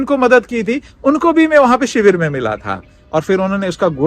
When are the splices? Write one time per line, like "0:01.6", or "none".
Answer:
0:02.9